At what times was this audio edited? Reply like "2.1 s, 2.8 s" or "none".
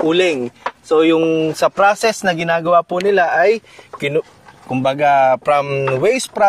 none